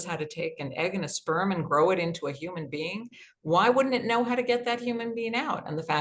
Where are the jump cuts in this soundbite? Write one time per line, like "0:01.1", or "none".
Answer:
none